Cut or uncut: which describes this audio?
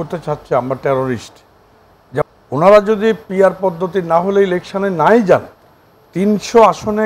cut